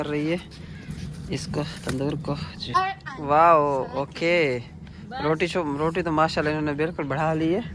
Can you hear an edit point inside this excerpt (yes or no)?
yes